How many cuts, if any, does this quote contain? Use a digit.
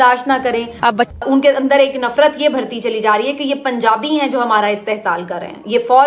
1